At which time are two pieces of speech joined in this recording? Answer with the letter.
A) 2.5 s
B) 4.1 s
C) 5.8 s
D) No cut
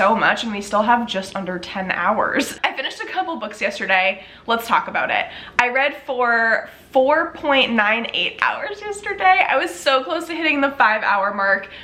D